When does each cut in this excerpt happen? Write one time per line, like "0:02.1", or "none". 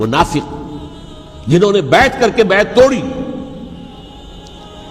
0:04.0